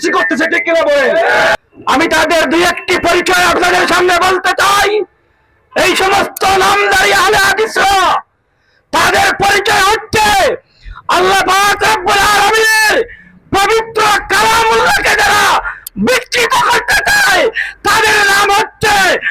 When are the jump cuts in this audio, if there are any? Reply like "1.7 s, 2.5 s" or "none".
1.6 s